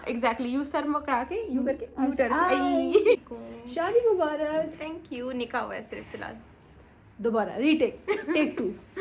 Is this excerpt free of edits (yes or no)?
no